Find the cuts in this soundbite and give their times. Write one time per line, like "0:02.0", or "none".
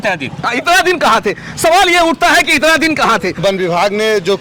0:03.4

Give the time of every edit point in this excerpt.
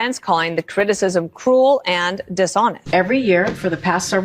0:02.8

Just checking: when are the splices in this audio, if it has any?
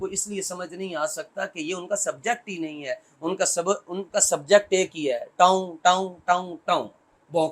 none

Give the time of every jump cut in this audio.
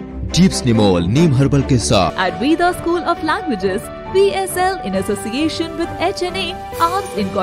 0:02.1

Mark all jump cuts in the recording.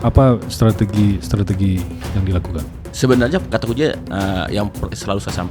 0:02.8

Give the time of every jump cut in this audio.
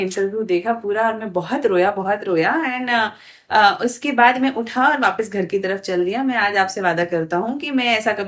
none

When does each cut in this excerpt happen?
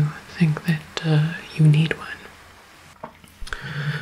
0:02.5

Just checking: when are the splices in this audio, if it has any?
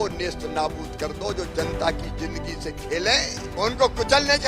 0:03.4

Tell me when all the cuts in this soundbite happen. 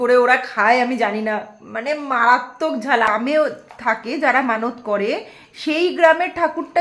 0:03.1

